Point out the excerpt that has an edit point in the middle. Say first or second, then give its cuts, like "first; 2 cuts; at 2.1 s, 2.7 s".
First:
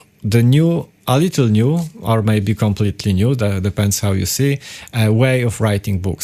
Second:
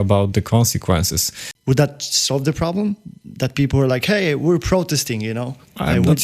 second; 1 cut; at 1.5 s